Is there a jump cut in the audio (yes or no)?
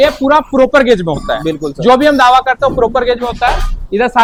no